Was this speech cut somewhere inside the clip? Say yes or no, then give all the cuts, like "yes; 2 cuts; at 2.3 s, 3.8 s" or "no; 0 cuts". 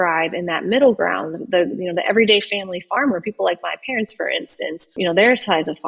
yes; 1 cut; at 5.0 s